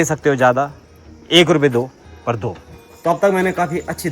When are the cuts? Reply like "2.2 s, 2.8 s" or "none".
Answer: 2.9 s